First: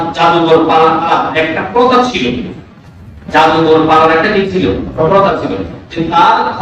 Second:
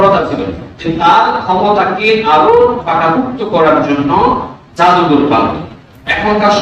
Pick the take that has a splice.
first; 1 cut; at 1.1 s

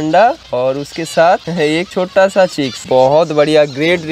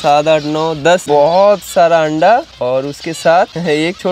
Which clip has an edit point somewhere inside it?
second; 1 cut; at 1.0 s

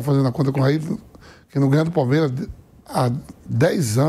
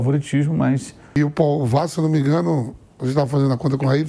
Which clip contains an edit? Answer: second; 1 cut; at 1.2 s

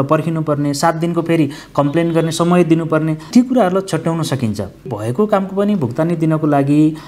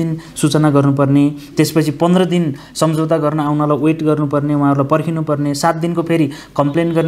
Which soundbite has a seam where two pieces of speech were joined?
first; 2 cuts; at 3.3 s, 4.9 s

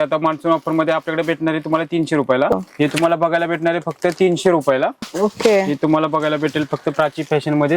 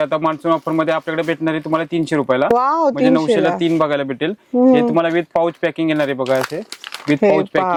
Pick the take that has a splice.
first; 2 cuts; at 2.5 s, 5.0 s

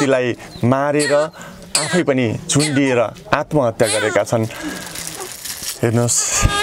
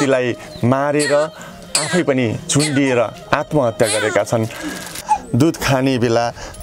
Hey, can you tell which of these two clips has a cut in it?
second; 1 cut; at 5.0 s

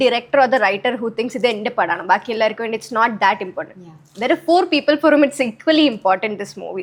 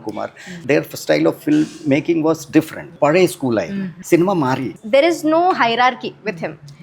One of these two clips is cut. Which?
second; 3 cuts; at 2.9 s, 4.0 s, 4.7 s

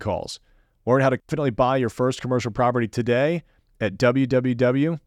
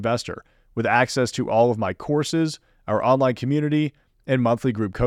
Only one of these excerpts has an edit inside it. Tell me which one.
first; 1 cut; at 1.3 s

